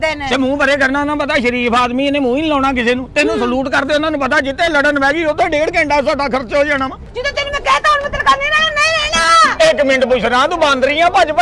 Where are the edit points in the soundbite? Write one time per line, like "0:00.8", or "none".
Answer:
0:07.0